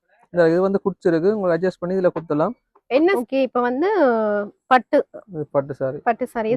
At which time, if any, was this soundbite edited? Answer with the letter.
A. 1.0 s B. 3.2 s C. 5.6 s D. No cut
B